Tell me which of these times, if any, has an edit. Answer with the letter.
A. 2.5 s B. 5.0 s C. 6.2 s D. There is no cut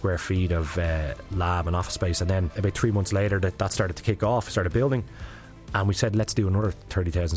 A